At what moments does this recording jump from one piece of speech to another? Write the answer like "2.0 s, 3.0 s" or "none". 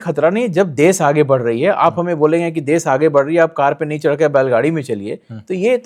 none